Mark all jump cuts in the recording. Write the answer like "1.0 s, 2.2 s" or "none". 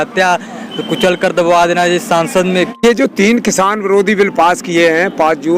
2.8 s

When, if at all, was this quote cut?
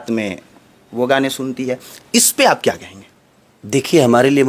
none

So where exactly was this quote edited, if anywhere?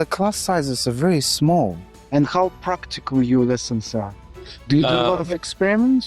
1.8 s

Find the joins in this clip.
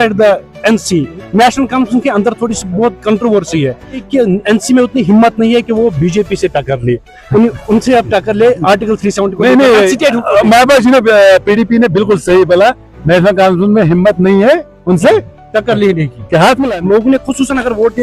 3.9 s, 16.6 s

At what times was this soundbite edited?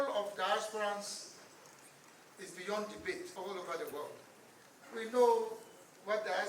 3.3 s

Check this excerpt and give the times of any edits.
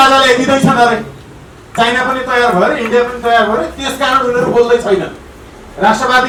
none

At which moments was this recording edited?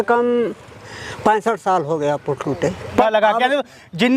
3.0 s

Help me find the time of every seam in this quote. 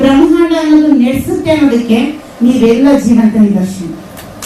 none

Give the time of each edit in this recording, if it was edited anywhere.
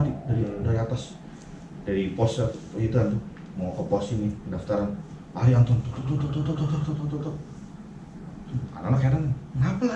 none

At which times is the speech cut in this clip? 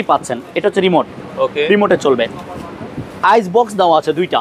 none

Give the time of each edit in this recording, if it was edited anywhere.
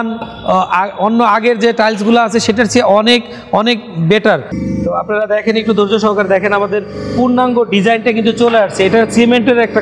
4.5 s

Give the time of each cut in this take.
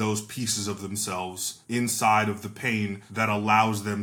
1.5 s, 3.0 s

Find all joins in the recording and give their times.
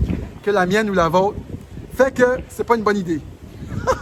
none

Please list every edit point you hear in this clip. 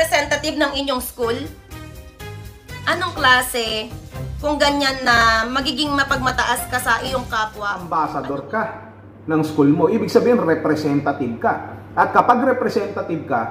7.7 s

